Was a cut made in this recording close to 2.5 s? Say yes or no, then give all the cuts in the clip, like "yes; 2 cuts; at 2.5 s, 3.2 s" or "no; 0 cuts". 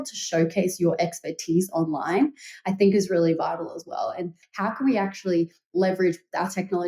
no; 1 cut; at 4.4 s